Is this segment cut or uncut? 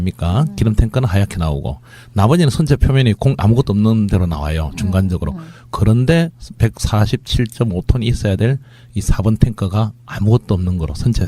cut